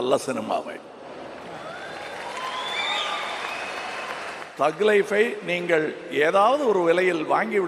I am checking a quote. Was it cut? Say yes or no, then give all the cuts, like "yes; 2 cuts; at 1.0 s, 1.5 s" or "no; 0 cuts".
no; 0 cuts